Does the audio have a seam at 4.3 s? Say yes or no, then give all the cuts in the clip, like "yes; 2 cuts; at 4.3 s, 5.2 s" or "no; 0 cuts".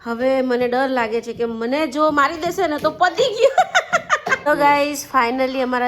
yes; 1 cut; at 4.3 s